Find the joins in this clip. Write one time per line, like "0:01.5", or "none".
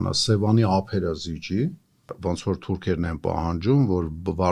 0:02.2